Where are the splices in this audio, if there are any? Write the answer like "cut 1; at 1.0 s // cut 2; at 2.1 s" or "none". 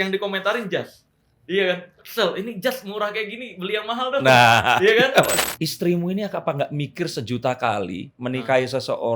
cut 1; at 5.3 s